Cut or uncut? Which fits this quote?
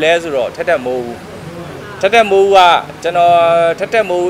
uncut